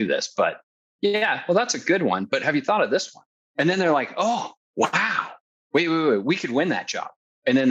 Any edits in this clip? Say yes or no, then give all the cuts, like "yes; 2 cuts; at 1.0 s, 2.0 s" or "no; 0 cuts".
yes; 3 cuts; at 3.3 s, 4.6 s, 5.5 s